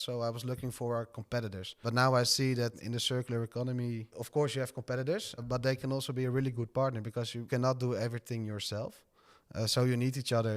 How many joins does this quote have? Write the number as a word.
two